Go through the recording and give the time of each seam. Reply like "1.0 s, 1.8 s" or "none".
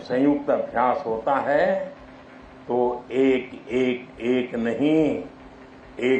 none